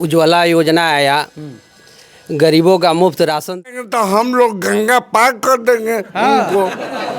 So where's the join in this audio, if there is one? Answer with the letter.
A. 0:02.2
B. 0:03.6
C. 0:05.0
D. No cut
B